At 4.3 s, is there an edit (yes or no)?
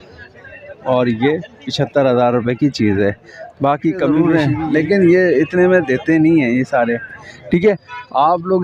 yes